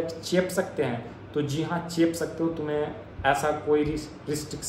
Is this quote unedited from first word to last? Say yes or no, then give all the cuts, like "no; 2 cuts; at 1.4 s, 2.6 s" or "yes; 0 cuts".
yes; 0 cuts